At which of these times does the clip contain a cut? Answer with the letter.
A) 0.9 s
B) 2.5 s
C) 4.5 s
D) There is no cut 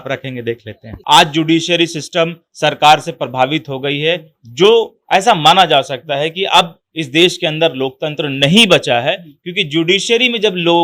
A